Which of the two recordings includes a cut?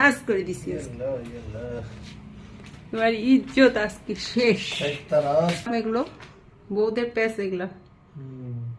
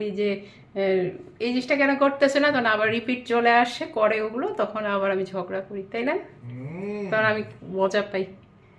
first; 1 cut; at 5.7 s

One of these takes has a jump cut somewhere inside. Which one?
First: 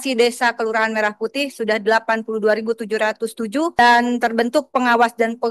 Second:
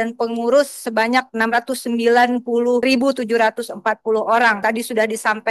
second; 1 cut; at 4.6 s

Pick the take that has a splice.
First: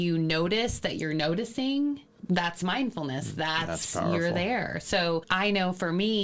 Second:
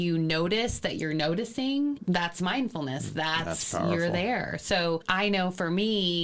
second; 1 cut; at 2.0 s

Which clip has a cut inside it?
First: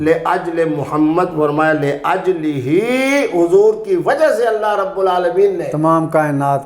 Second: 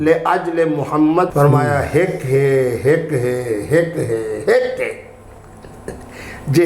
second; 1 cut; at 1.3 s

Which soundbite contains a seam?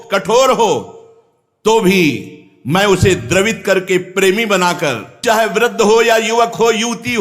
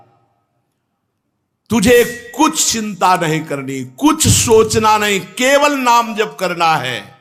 first; 1 cut; at 5.2 s

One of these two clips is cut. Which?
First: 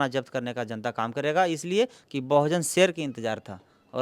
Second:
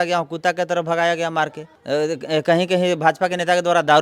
second; 1 cut; at 1.7 s

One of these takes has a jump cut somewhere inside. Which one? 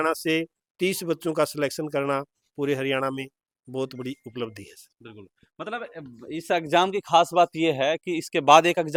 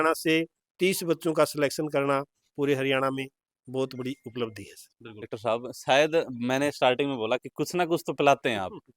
second; 1 cut; at 5.3 s

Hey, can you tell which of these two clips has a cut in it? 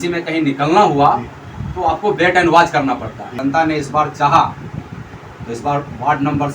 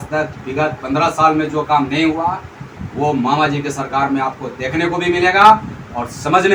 first; 1 cut; at 3.2 s

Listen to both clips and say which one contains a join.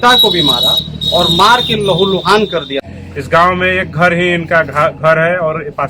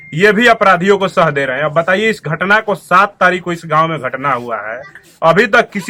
first; 1 cut; at 2.8 s

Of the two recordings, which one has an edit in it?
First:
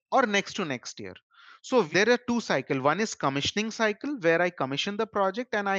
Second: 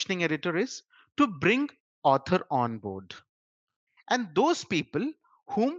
first; 1 cut; at 1.9 s

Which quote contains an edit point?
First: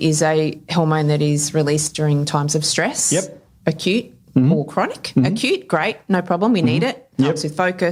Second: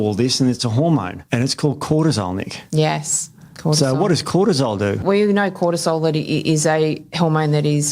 second; 2 cuts; at 1.2 s, 5.0 s

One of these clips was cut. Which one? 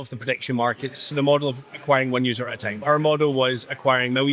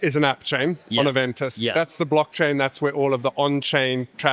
first; 2 cuts; at 1.1 s, 2.8 s

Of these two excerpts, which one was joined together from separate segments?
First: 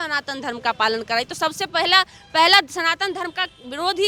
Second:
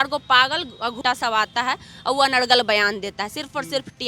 second; 1 cut; at 1.0 s

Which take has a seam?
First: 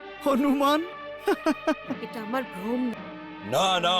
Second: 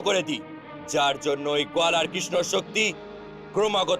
first; 1 cut; at 3.0 s

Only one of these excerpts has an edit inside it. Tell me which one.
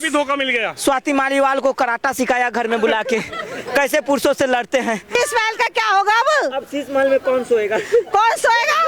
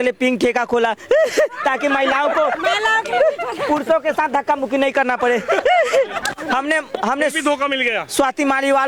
first; 1 cut; at 5.2 s

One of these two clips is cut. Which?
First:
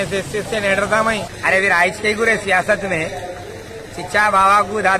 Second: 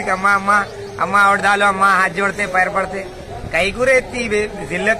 first; 1 cut; at 1.3 s

